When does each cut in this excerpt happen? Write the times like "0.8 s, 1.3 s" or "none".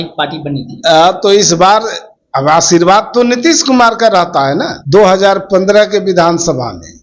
4.8 s